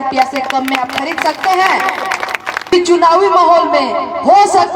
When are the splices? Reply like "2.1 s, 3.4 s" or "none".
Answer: 2.7 s